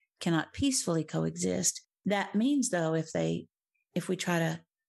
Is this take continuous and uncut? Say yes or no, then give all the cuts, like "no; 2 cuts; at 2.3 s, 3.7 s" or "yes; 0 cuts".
yes; 0 cuts